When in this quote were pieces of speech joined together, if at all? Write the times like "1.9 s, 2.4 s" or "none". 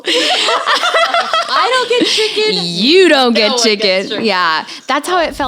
1.5 s